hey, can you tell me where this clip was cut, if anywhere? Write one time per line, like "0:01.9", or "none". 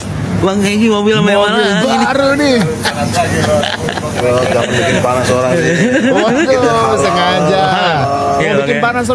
none